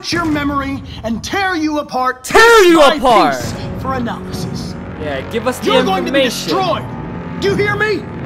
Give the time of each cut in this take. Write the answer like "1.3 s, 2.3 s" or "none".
none